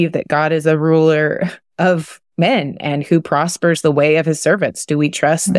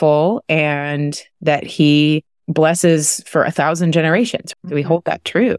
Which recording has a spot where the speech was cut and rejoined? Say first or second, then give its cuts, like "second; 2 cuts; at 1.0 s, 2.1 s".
second; 1 cut; at 4.4 s